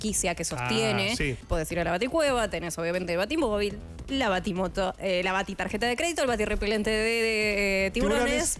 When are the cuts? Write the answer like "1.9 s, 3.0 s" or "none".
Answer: 1.4 s